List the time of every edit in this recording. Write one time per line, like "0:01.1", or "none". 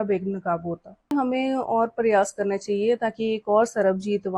0:01.1